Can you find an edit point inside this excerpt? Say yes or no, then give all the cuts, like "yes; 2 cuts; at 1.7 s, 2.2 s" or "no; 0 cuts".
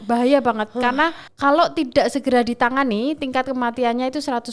yes; 1 cut; at 1.3 s